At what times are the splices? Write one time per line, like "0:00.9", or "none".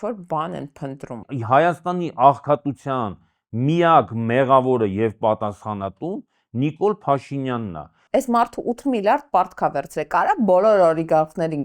0:01.3
0:08.0